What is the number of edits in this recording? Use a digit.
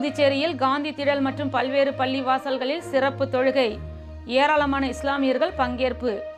0